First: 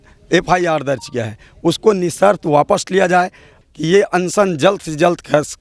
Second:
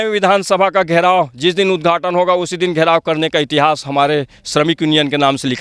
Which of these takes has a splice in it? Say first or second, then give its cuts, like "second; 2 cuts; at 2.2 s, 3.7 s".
first; 1 cut; at 3.5 s